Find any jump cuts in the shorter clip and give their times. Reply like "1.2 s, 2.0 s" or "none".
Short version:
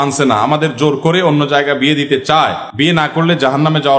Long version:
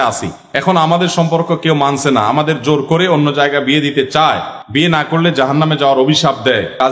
2.6 s